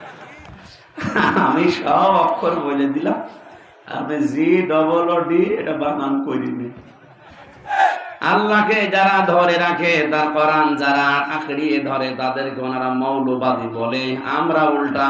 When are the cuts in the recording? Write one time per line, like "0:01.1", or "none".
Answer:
0:07.8